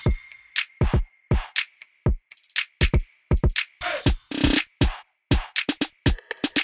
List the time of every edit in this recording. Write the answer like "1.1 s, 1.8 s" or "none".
1.8 s